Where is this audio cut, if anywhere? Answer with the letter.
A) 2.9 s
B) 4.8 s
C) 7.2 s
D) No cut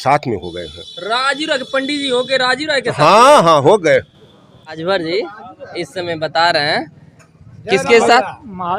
B